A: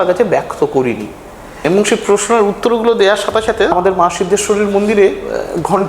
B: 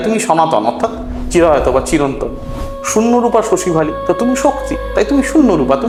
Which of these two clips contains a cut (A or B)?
A